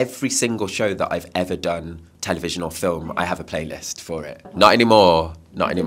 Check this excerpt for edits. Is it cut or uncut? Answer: cut